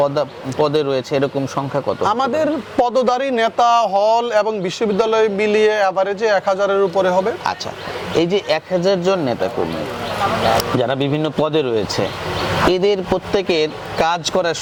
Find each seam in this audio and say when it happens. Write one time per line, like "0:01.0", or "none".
none